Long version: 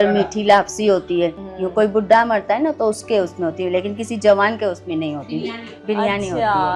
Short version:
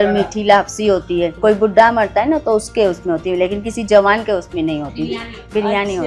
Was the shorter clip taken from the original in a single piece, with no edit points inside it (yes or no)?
no